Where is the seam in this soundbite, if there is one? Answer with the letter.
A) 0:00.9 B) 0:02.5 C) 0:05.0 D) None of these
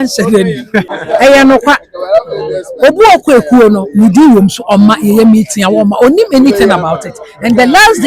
A